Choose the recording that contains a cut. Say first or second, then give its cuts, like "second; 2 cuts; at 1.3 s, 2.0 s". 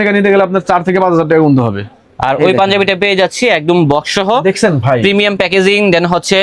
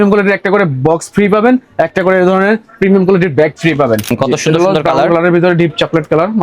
second; 1 cut; at 4.1 s